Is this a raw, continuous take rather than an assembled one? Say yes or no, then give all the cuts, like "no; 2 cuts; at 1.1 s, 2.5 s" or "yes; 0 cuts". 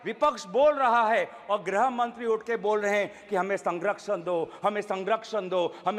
yes; 0 cuts